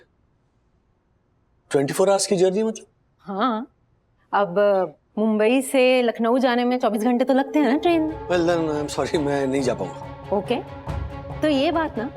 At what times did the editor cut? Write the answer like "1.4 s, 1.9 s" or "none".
8.2 s